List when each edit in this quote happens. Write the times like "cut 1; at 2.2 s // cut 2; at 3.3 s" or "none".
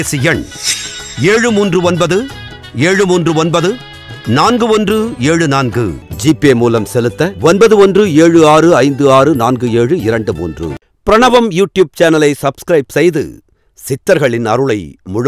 cut 1; at 10.7 s

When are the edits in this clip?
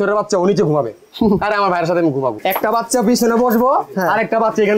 cut 1; at 2.4 s

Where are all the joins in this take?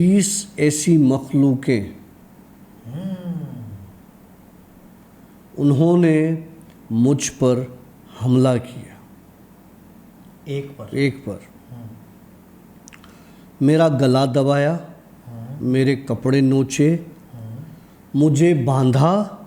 none

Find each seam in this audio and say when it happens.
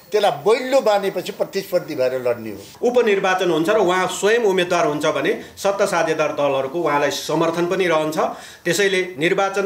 cut 1; at 2.7 s

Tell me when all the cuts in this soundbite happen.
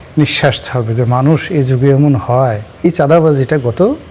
cut 1; at 2.9 s

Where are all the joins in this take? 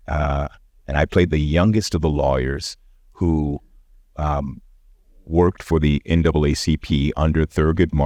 none

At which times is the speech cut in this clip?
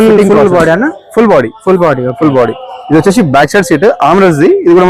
none

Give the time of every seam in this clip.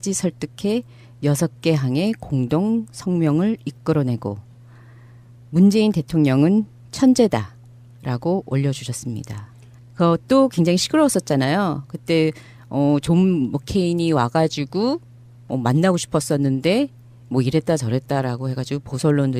none

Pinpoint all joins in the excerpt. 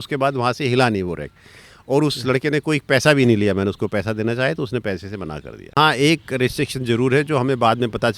cut 1; at 5.7 s

